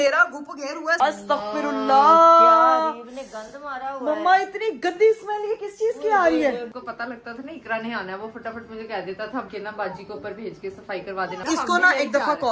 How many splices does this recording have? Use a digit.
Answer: 4